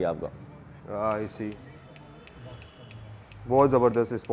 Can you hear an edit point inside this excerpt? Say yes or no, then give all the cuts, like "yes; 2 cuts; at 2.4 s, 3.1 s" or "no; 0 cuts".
no; 0 cuts